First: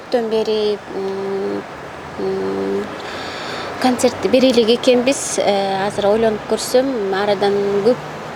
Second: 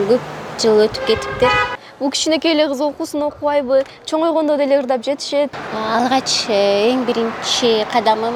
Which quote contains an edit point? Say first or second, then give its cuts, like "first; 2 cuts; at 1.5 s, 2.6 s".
second; 2 cuts; at 1.8 s, 5.5 s